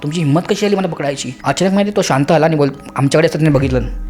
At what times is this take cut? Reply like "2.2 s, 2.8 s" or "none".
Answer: 1.3 s